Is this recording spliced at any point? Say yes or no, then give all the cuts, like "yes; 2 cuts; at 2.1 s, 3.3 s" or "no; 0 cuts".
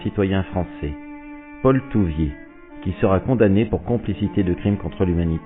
yes; 1 cut; at 4.2 s